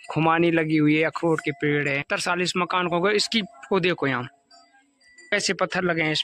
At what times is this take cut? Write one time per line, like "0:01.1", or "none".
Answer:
0:02.0
0:05.3